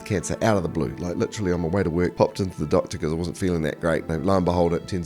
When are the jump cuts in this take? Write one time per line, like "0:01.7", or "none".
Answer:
0:02.1
0:04.1